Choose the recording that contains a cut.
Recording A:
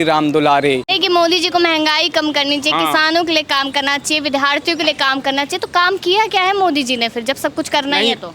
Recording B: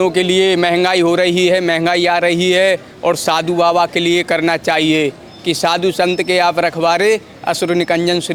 A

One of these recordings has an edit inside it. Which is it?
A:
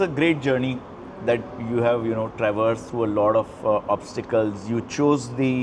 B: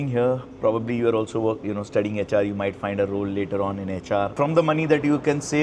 B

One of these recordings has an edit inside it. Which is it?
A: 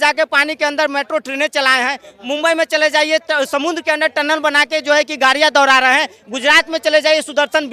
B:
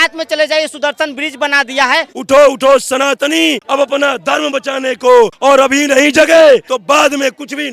B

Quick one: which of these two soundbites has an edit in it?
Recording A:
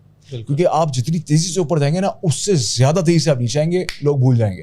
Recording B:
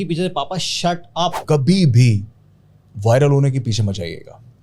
B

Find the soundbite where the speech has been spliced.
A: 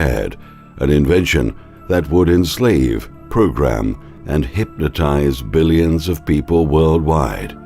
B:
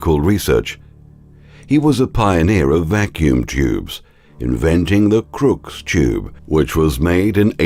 A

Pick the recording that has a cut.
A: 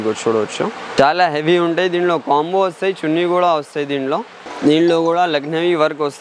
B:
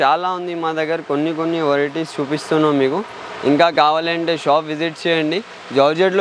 A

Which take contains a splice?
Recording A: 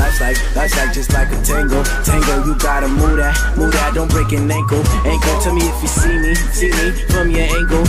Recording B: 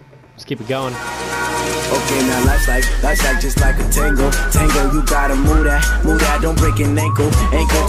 B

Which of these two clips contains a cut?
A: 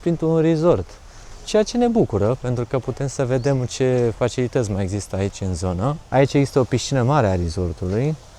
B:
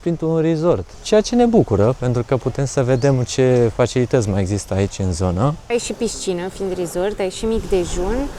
B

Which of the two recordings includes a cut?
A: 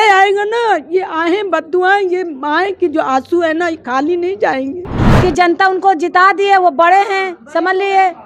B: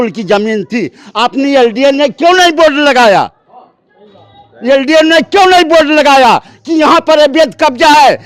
A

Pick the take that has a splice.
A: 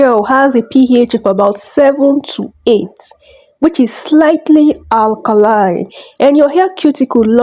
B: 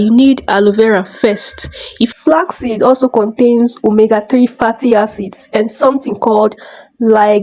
B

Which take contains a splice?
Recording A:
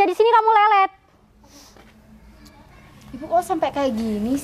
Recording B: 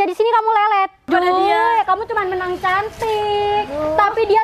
B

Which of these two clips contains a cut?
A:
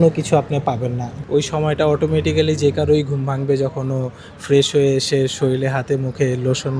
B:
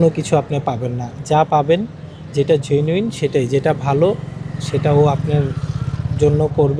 A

